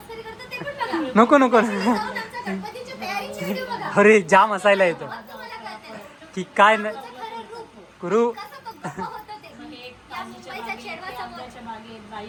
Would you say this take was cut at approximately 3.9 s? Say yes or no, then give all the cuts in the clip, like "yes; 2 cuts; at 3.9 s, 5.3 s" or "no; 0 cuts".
no; 0 cuts